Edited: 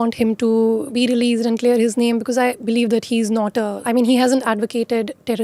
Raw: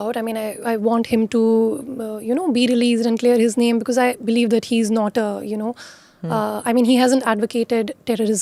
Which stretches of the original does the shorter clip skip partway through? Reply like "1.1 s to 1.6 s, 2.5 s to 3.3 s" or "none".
1.8 s to 2.5 s, 5.4 s to 6.6 s